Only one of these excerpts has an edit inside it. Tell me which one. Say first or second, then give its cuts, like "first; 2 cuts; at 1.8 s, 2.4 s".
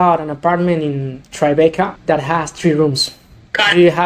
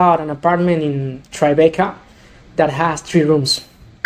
first; 1 cut; at 2.0 s